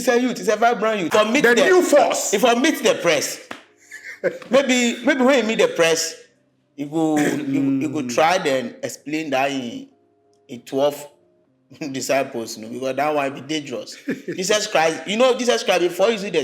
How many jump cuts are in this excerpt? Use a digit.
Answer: 1